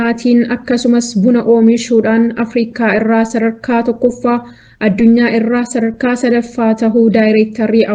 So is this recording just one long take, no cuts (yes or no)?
yes